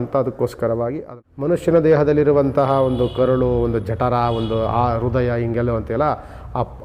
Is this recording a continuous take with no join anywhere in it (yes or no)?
no